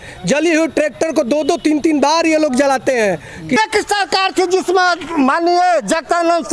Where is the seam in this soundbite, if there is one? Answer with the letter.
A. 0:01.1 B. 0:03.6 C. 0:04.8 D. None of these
B